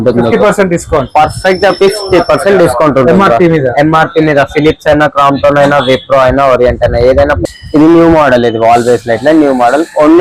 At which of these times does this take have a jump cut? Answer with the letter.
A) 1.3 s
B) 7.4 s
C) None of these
B